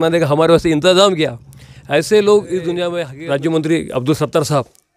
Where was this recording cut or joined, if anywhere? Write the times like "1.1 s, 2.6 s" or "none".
3.1 s